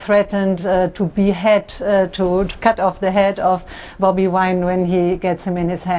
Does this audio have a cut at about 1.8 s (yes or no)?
no